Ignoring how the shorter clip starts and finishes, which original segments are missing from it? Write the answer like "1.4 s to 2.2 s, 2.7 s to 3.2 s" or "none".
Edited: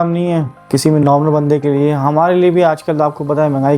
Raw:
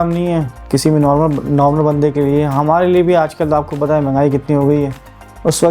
1.0 s to 1.5 s